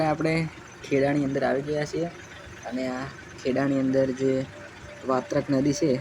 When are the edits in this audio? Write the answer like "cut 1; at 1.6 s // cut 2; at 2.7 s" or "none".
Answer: none